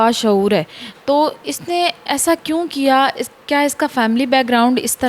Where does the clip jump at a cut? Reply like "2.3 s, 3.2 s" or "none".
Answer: none